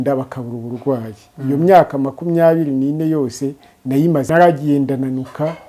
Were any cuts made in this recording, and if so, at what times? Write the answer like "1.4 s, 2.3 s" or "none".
4.3 s